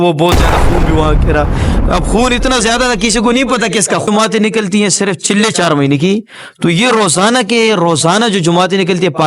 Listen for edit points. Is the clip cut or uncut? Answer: cut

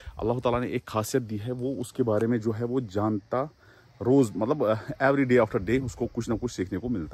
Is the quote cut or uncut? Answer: uncut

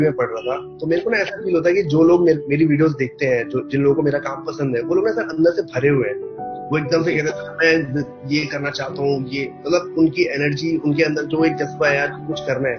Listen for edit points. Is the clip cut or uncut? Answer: uncut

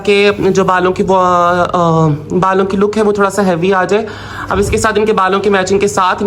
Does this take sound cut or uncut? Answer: uncut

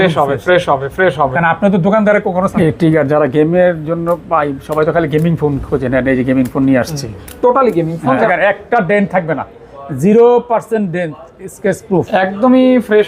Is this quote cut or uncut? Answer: cut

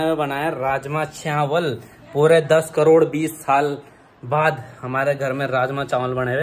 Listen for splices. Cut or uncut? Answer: uncut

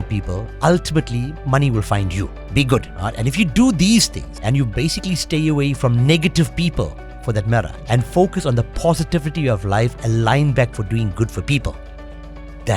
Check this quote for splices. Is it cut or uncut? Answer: cut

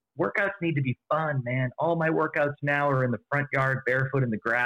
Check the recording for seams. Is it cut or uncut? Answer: uncut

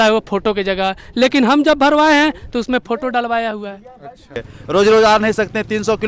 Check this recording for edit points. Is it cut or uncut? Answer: cut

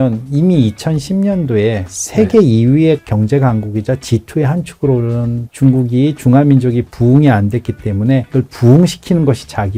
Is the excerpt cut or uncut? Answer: uncut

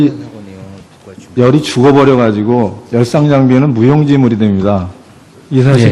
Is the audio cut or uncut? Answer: cut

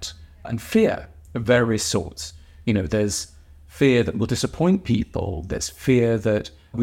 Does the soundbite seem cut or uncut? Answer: uncut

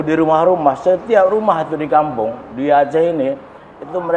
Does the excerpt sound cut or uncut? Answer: uncut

